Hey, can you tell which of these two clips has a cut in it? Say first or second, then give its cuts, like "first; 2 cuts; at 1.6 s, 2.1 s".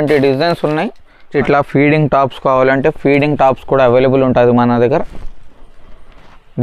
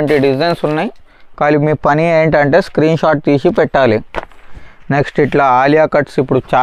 first; 1 cut; at 1.3 s